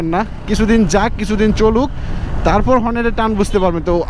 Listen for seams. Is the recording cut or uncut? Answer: uncut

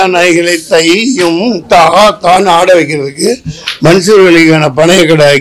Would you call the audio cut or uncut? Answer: uncut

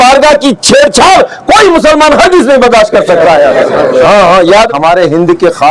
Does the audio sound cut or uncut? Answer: cut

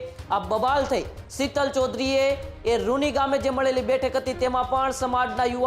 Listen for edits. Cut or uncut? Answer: cut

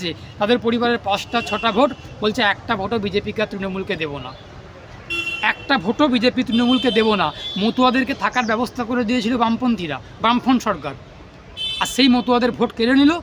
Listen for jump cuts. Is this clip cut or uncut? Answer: uncut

